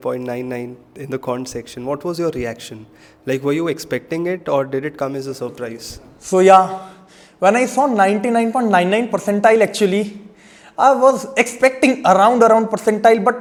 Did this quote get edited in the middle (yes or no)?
no